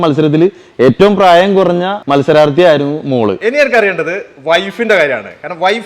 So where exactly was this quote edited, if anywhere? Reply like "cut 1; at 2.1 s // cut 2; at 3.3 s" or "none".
cut 1; at 2.0 s // cut 2; at 3.4 s